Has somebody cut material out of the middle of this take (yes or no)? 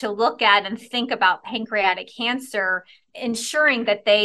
yes